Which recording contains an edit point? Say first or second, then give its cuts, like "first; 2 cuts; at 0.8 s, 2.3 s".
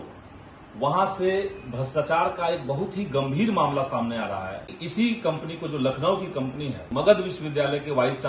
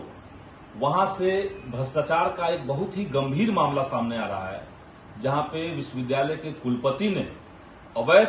first; 2 cuts; at 4.8 s, 6.8 s